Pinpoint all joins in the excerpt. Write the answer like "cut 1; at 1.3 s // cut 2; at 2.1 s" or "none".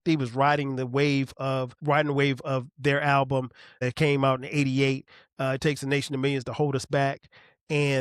cut 1; at 1.7 s // cut 2; at 3.8 s